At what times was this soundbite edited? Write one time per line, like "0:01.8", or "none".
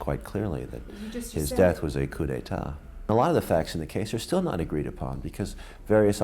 0:03.1